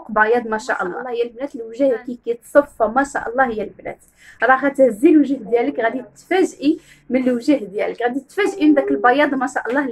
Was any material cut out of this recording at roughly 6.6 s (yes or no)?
no